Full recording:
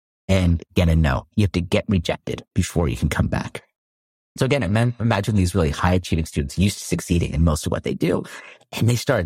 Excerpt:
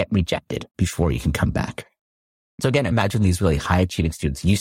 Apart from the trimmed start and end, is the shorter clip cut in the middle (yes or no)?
yes